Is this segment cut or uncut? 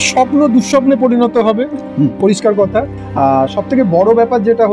uncut